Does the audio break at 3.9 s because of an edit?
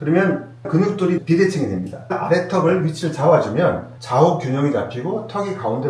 no; 1 cut; at 2.0 s

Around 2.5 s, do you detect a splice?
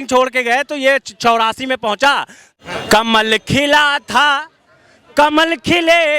yes; 1 cut; at 2.5 s

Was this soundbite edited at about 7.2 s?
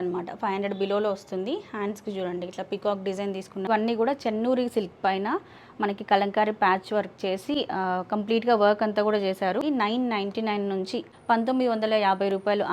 no; 3 cuts; at 3.7 s, 9.6 s, 11.1 s

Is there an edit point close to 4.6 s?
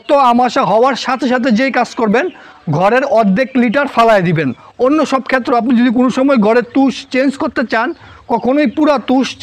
yes; 1 cut; at 4.6 s

